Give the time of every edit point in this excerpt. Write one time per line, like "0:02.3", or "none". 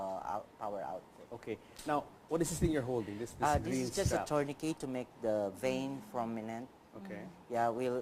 0:02.6